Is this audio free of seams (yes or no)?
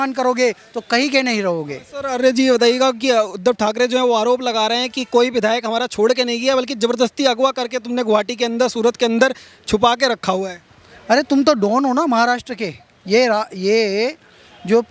yes